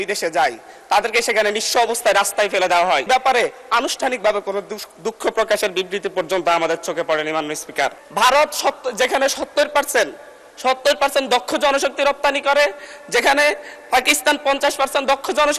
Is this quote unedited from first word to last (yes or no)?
no